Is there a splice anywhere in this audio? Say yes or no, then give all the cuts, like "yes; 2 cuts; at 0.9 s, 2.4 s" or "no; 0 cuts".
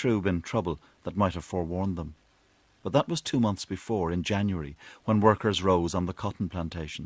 no; 0 cuts